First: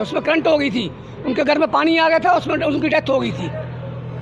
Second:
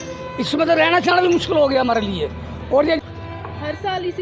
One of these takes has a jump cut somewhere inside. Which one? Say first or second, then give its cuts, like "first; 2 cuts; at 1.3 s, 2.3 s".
second; 1 cut; at 3.0 s